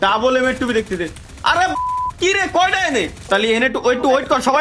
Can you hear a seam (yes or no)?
yes